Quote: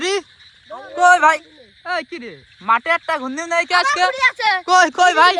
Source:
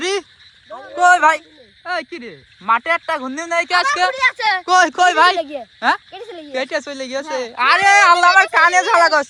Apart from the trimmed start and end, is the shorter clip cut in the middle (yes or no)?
no